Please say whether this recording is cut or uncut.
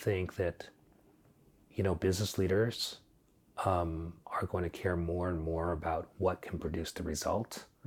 uncut